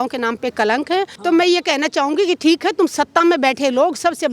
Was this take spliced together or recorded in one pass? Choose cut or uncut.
cut